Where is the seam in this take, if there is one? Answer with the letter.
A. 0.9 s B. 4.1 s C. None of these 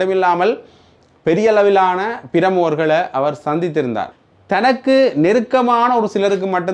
B